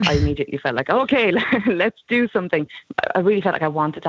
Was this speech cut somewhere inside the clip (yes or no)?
yes